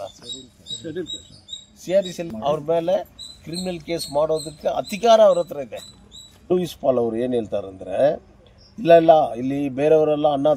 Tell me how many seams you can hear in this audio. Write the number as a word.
two